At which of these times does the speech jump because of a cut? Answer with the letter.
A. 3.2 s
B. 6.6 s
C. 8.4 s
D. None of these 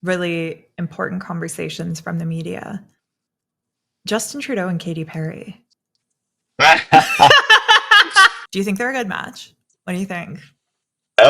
C